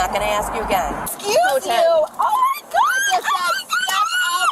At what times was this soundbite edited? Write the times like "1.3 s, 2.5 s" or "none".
1.1 s